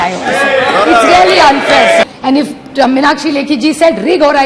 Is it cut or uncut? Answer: cut